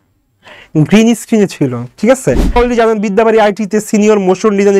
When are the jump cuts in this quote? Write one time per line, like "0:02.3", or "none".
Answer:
0:02.6